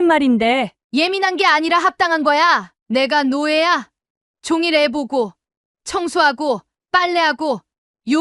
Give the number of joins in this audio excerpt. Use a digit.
0